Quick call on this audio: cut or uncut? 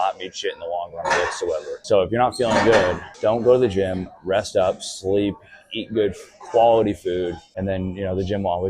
cut